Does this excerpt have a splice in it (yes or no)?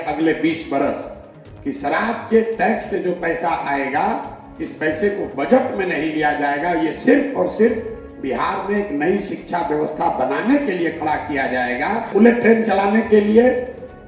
yes